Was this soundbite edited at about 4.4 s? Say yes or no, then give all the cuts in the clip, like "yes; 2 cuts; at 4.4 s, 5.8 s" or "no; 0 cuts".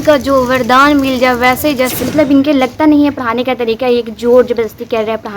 no; 1 cut; at 2.0 s